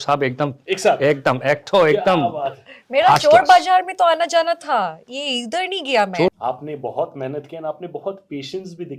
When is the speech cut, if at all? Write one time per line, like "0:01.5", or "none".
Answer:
0:06.3